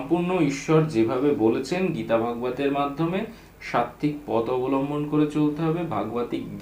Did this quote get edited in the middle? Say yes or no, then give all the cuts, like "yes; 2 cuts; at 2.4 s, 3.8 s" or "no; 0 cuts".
no; 0 cuts